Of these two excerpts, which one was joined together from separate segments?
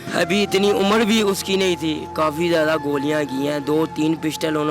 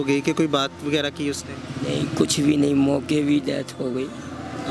first; 1 cut; at 2.1 s

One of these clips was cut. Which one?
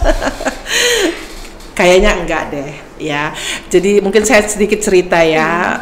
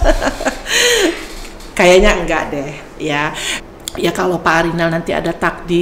second; 1 cut; at 3.5 s

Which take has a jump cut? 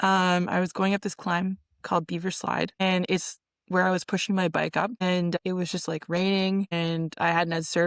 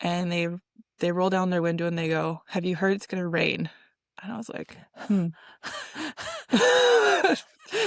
first; 3 cuts; at 2.8 s, 5.4 s, 6.7 s

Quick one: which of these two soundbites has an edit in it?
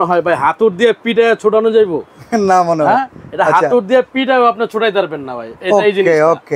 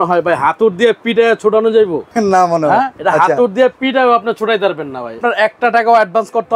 second; 3 cuts; at 2.0 s, 2.9 s, 5.2 s

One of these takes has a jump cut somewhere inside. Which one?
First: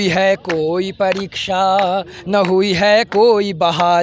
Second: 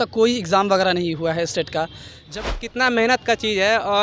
second; 1 cut; at 2.3 s

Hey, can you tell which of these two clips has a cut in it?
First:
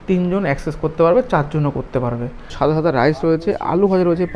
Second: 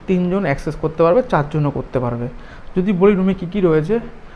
first; 1 cut; at 2.5 s

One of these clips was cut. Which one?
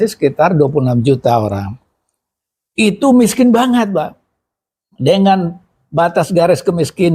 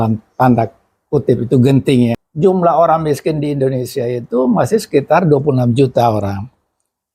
second; 1 cut; at 2.2 s

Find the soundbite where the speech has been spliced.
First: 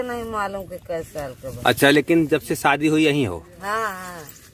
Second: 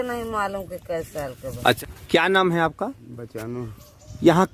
second; 1 cut; at 1.8 s

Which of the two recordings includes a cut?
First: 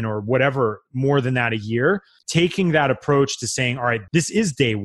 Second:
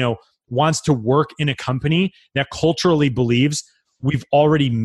first; 2 cuts; at 2.1 s, 4.0 s

